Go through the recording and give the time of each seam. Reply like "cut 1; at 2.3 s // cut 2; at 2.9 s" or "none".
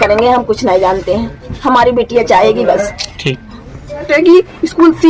cut 1; at 4.1 s

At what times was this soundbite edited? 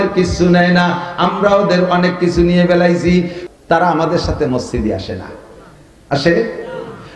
cut 1; at 3.4 s

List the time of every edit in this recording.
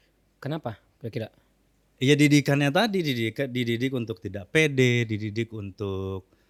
none

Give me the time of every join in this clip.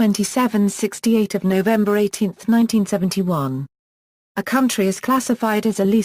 cut 1; at 2.0 s

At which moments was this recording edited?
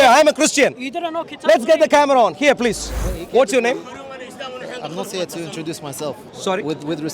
cut 1; at 2.9 s

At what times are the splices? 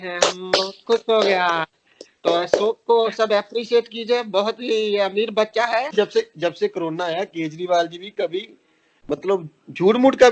cut 1; at 5.9 s

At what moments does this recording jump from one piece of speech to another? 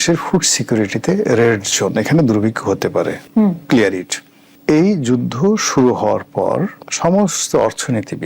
none

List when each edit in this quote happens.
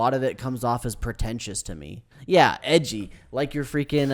cut 1; at 2.1 s

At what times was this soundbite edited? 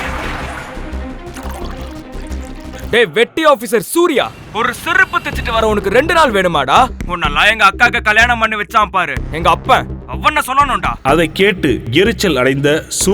cut 1; at 2.8 s

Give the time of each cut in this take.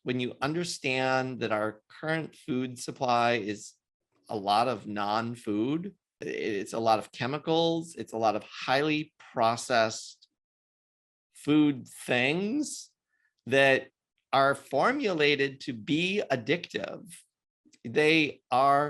cut 1; at 6.2 s

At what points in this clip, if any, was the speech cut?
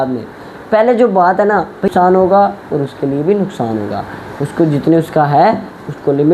cut 1; at 1.9 s

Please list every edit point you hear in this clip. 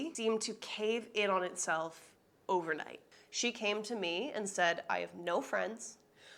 cut 1; at 3.0 s

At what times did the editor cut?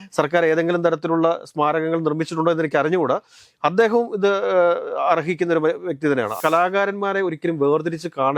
cut 1; at 6.4 s

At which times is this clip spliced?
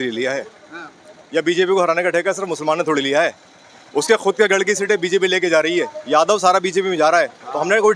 none

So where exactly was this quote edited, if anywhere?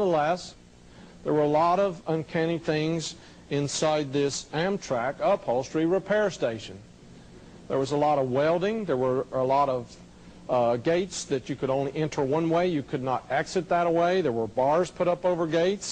cut 1; at 11.1 s

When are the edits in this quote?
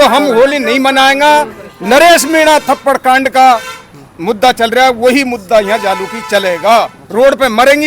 none

